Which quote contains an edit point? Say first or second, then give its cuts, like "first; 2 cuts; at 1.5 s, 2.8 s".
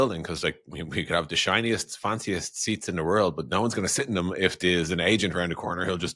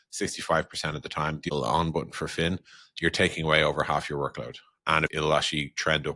second; 2 cuts; at 1.5 s, 5.1 s